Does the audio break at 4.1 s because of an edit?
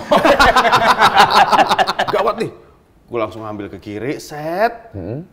no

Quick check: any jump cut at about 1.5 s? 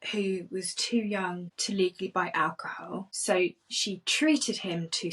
yes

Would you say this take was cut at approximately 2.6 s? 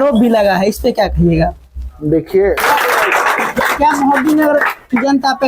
yes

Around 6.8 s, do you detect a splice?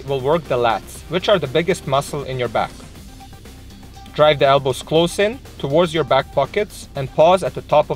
no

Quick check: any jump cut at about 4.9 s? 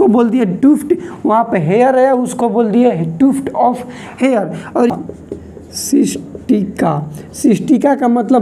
yes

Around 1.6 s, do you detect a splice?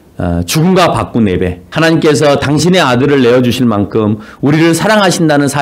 yes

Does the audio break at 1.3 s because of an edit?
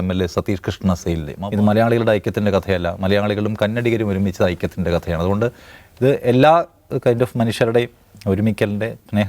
yes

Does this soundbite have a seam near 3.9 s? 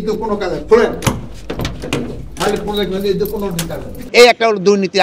yes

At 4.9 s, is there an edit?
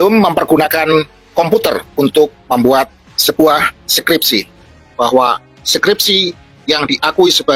yes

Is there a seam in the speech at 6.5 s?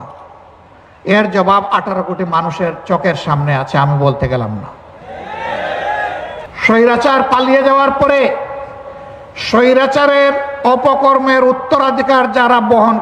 yes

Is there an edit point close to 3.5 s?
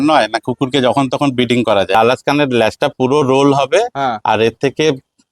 no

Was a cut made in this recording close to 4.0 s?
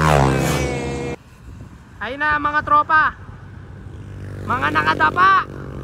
no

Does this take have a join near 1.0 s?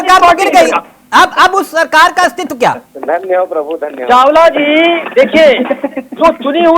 no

